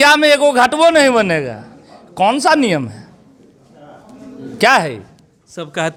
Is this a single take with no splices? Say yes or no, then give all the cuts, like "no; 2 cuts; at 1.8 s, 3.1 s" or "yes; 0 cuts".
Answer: yes; 0 cuts